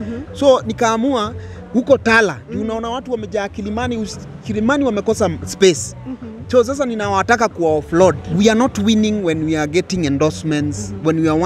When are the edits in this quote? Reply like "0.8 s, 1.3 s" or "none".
8.2 s